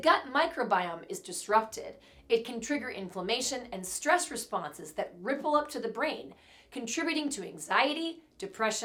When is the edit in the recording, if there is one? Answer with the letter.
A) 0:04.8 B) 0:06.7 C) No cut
C